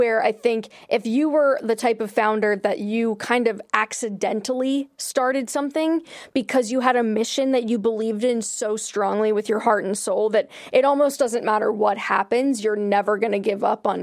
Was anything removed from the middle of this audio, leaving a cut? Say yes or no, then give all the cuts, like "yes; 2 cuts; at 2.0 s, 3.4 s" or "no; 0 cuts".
no; 0 cuts